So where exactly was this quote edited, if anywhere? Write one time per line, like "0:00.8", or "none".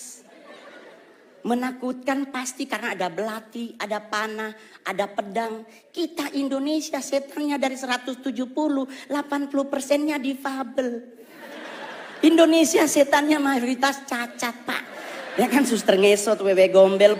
none